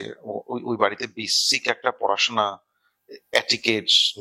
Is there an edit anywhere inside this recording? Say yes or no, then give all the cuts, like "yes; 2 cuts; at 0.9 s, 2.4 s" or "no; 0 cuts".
no; 0 cuts